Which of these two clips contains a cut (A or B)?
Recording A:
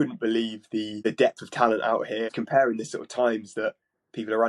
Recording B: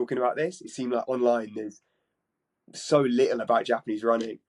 A